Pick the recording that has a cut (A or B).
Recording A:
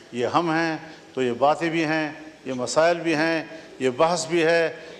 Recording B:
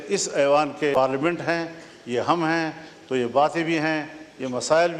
B